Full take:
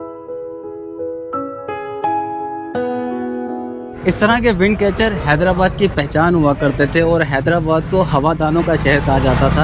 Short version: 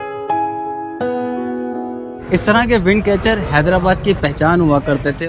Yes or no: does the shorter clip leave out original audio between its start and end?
no